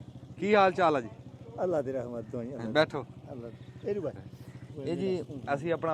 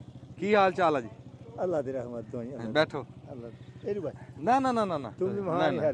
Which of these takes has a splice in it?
first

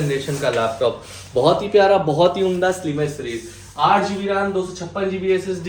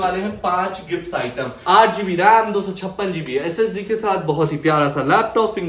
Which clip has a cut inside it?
second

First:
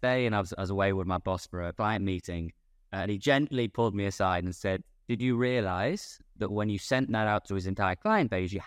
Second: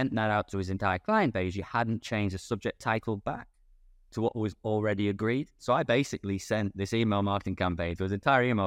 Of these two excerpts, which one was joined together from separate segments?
first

